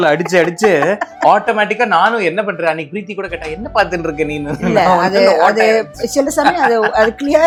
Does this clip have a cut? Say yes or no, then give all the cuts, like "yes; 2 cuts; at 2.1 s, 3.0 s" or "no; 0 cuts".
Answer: no; 0 cuts